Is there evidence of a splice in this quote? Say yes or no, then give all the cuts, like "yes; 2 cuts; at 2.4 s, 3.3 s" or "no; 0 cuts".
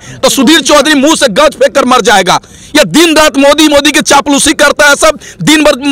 no; 0 cuts